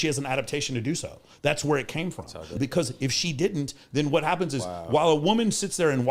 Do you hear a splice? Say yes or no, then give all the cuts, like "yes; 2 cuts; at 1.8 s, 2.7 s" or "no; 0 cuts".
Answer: yes; 1 cut; at 2.5 s